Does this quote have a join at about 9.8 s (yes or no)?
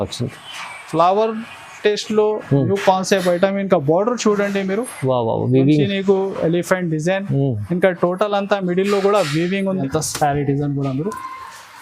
yes